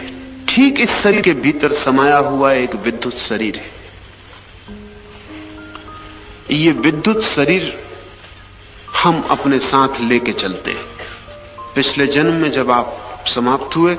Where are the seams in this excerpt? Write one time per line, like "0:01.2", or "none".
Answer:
0:01.2